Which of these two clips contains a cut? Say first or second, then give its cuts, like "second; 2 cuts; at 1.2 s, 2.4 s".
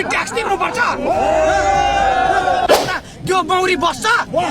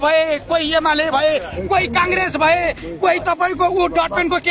first; 1 cut; at 2.7 s